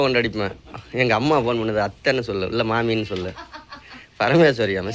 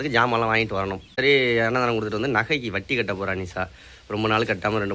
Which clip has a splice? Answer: second; 1 cut; at 1.2 s

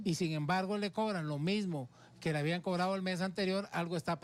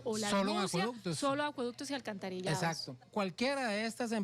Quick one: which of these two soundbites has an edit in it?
second; 1 cut; at 3.0 s

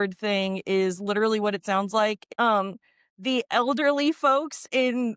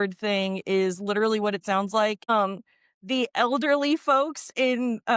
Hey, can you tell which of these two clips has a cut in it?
second; 1 cut; at 2.3 s

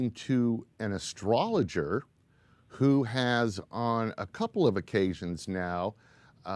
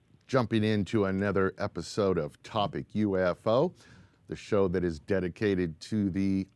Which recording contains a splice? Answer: first; 1 cut; at 2.6 s

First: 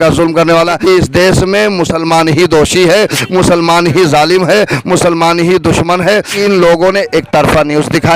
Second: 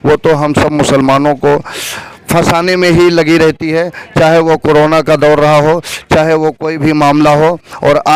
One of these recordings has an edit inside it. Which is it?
first; 2 cuts; at 0.8 s, 6.4 s

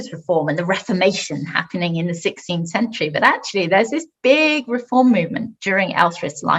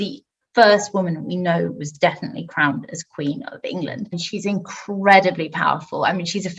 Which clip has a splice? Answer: second; 1 cut; at 4.2 s

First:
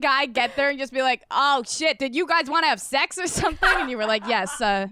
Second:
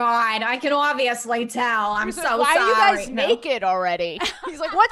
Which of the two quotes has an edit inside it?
first; 1 cut; at 2.0 s

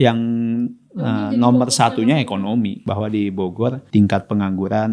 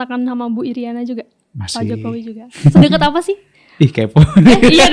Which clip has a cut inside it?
first; 2 cuts; at 2.8 s, 3.8 s

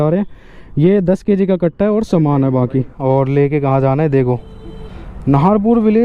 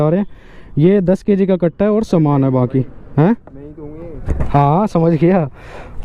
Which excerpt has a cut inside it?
first; 1 cut; at 2.9 s

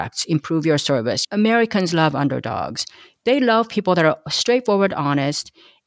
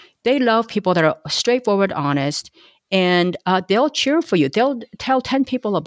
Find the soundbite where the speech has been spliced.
first; 1 cut; at 1.2 s

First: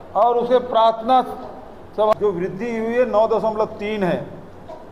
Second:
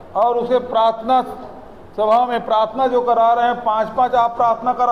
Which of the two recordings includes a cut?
first; 1 cut; at 2.1 s

